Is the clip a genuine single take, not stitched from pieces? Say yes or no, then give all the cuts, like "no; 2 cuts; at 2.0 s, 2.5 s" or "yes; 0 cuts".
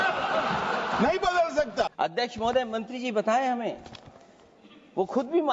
no; 1 cut; at 1.9 s